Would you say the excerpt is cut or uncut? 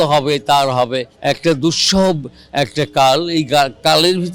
cut